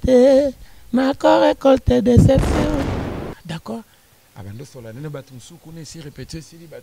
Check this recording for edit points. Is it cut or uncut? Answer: cut